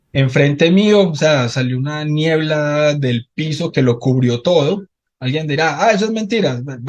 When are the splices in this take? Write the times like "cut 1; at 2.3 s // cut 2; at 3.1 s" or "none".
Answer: none